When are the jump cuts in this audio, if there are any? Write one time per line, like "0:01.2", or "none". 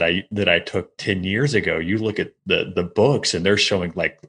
none